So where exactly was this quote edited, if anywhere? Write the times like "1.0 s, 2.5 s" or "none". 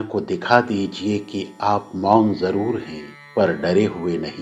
3.4 s

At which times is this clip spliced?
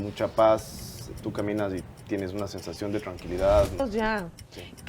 3.8 s

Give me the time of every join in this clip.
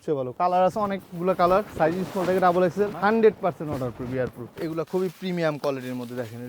1.7 s, 2.9 s, 4.5 s

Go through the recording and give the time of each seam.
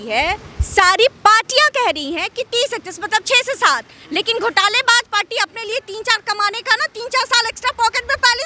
none

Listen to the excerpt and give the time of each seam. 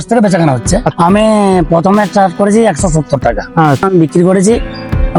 0.9 s, 3.8 s

